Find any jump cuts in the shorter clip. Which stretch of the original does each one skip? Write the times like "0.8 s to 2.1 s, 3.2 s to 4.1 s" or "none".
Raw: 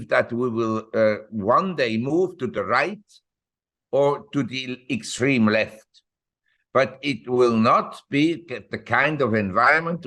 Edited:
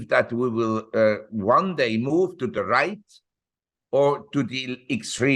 none